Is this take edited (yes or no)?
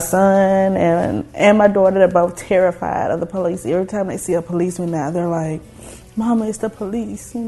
no